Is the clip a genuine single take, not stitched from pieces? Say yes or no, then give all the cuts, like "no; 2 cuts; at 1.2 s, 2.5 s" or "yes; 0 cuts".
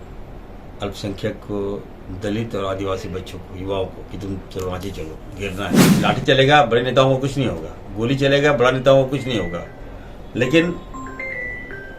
no; 1 cut; at 6.0 s